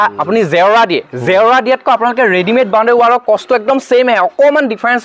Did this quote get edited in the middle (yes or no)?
no